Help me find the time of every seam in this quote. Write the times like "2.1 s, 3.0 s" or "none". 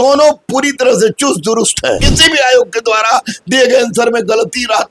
2.0 s